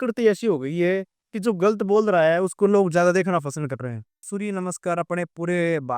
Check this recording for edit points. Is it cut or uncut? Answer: cut